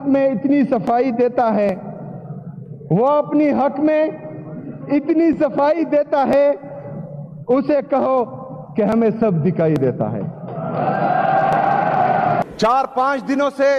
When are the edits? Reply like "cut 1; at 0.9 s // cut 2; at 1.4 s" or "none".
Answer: cut 1; at 12.4 s